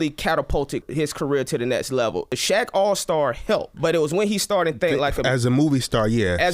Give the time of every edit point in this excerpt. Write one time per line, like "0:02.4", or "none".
0:00.9
0:02.3
0:03.7